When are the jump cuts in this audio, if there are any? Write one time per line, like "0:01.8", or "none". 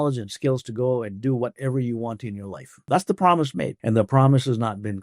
0:02.9
0:03.8